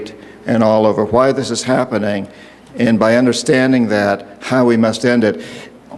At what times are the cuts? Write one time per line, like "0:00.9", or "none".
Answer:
0:01.8

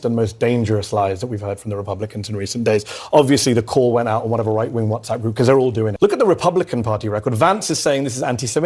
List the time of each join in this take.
0:05.9

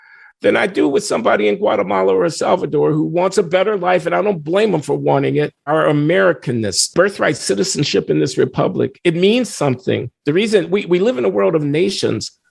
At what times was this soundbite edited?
0:05.7
0:06.8

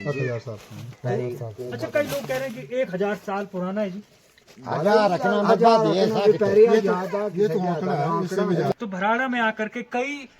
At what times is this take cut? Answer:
0:08.7

